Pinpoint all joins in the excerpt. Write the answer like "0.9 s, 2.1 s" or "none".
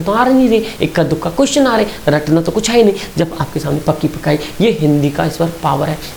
none